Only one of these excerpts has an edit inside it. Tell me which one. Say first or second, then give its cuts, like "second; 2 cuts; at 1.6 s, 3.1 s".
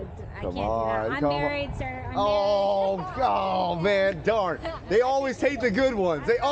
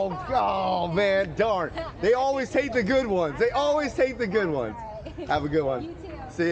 second; 1 cut; at 4.7 s